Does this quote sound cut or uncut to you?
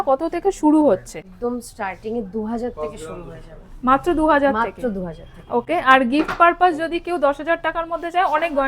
cut